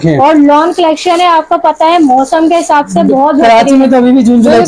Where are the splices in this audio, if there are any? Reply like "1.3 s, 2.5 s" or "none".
none